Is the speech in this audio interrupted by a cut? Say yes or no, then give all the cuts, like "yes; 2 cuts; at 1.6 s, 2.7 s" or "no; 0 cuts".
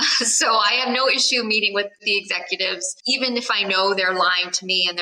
yes; 2 cuts; at 2.0 s, 2.9 s